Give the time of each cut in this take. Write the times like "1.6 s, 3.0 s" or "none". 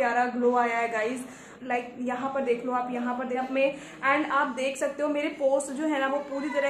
1.5 s, 3.4 s